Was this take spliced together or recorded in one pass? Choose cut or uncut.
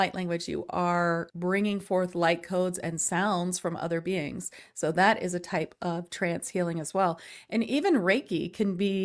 uncut